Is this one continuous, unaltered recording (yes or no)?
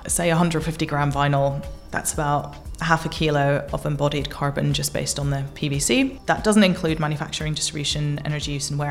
no